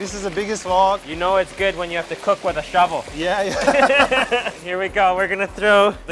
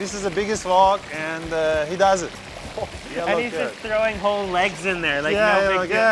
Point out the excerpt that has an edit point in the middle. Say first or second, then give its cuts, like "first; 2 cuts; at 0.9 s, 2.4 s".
first; 2 cuts; at 1.1 s, 4.6 s